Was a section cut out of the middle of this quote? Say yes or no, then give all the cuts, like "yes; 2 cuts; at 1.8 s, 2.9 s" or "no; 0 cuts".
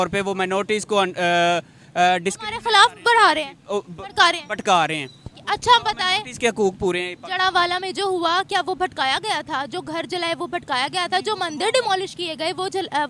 no; 0 cuts